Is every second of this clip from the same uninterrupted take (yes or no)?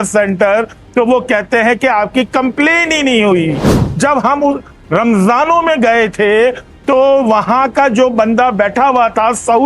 no